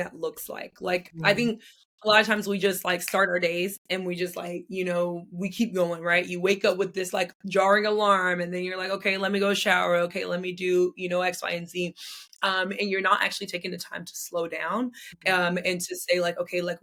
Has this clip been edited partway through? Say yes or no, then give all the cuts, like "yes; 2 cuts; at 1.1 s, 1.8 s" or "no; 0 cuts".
no; 0 cuts